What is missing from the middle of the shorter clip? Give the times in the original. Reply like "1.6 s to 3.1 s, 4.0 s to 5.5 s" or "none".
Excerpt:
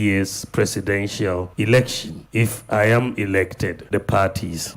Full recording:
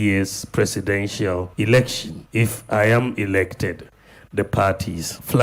3.8 s to 4.2 s